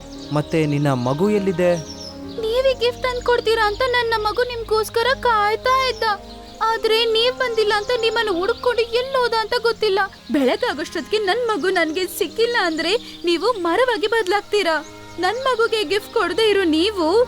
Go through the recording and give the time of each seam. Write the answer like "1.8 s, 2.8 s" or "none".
10.2 s